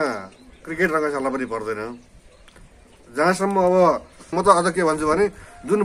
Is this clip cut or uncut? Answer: cut